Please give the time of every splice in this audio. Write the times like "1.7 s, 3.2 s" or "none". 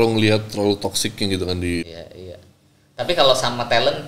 1.9 s